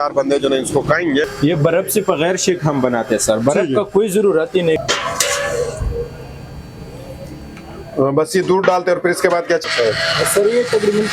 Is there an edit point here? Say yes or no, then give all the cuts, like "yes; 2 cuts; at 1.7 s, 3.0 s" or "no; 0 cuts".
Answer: yes; 3 cuts; at 1.3 s, 4.8 s, 9.6 s